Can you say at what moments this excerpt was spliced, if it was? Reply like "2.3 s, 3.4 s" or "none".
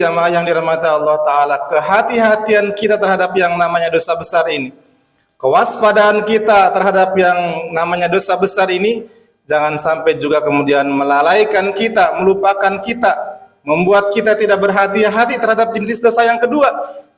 15.9 s